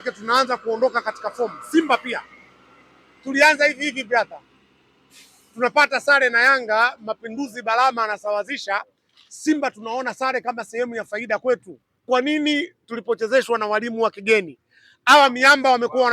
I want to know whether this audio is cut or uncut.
cut